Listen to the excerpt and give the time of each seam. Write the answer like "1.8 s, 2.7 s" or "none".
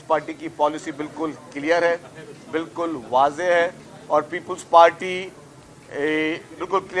none